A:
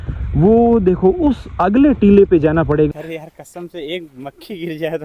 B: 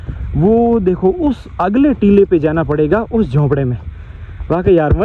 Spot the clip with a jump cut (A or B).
A